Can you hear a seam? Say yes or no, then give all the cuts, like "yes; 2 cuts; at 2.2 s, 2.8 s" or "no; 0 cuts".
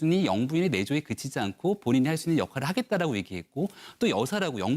no; 0 cuts